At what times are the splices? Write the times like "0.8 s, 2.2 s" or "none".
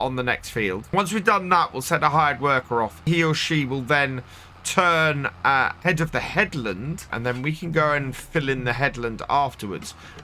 0.9 s, 3.1 s, 5.8 s, 7.1 s